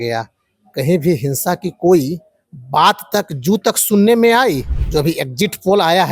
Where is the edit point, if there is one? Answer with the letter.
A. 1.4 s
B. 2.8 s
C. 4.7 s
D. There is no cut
C